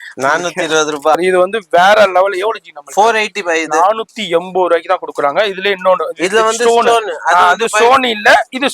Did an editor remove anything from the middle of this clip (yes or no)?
yes